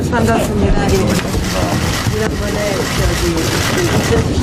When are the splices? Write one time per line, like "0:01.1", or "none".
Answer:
none